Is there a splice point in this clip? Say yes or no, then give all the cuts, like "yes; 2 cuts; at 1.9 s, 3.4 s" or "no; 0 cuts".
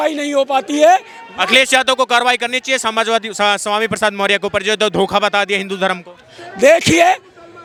no; 0 cuts